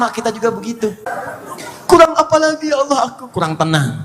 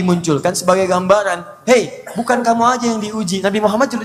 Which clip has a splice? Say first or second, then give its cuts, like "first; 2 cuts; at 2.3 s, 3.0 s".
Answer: first; 1 cut; at 1.0 s